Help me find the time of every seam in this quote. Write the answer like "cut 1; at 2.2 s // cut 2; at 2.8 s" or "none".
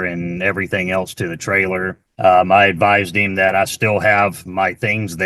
none